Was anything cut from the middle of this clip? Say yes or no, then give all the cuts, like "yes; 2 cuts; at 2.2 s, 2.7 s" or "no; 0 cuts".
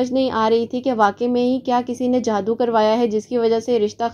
no; 0 cuts